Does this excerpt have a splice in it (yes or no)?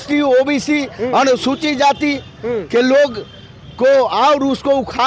no